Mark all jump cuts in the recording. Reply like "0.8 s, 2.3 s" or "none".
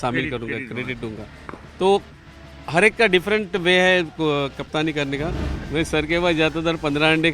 5.5 s